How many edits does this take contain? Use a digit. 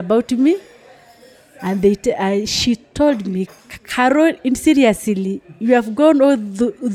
0